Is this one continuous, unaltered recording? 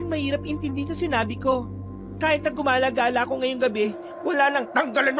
yes; 0 cuts

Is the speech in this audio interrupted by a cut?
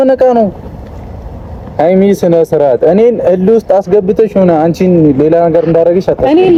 no; 0 cuts

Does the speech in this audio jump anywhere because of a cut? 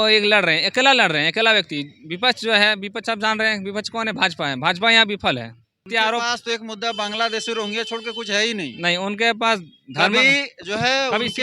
yes; 1 cut; at 5.9 s

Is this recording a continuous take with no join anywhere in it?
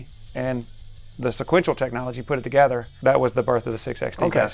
no; 1 cut; at 2.9 s

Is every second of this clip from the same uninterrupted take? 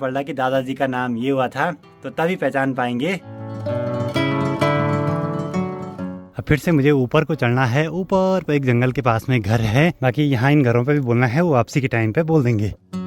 yes; 0 cuts

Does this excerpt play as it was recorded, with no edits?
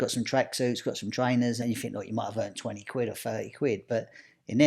no; 1 cut; at 1.6 s

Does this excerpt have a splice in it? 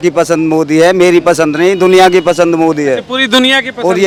no; 0 cuts

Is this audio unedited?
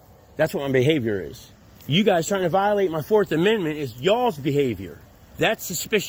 yes; 0 cuts

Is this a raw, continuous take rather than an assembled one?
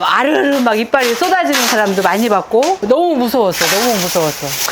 yes; 0 cuts

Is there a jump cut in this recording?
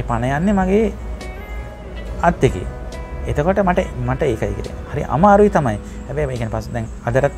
no; 0 cuts

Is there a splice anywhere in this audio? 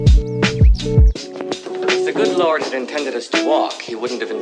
yes; 1 cut; at 1.1 s

